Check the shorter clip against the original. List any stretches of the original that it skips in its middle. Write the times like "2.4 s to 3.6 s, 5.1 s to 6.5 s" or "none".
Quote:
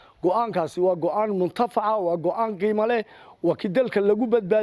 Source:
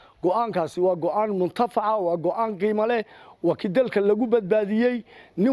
none